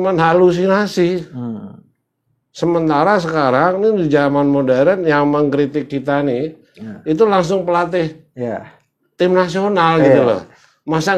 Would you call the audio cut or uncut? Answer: uncut